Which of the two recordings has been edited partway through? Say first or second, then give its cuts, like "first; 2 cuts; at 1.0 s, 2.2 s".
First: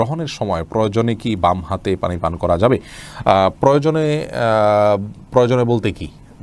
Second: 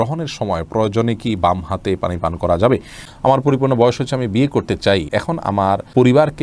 second; 2 cuts; at 3.0 s, 5.5 s